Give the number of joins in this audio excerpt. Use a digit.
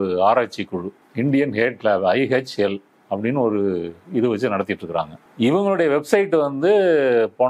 0